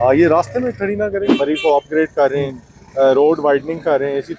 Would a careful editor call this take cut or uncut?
cut